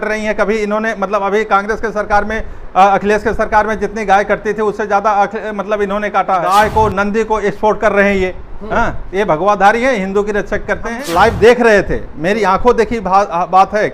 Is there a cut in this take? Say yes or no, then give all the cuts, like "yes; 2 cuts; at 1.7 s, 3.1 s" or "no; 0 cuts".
yes; 2 cuts; at 6.4 s, 11.0 s